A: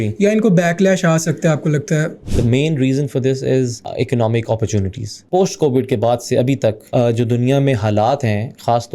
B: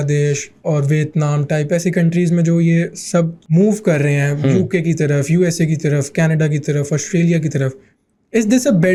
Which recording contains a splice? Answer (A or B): A